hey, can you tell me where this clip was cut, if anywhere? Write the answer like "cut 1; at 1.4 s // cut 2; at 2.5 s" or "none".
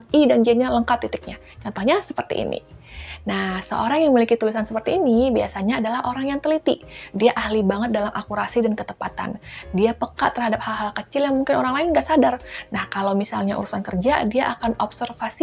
none